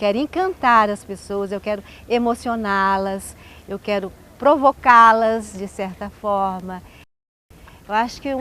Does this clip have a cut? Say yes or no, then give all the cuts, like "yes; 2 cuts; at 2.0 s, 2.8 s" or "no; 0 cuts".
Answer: yes; 1 cut; at 7.3 s